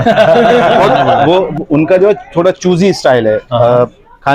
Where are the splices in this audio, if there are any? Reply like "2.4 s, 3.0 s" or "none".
1.2 s